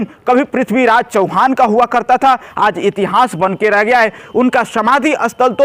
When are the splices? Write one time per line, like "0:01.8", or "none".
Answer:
none